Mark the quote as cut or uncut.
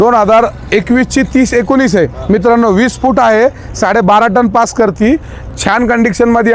uncut